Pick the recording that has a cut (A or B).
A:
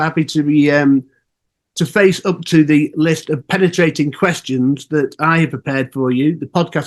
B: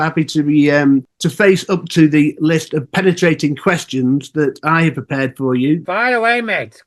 B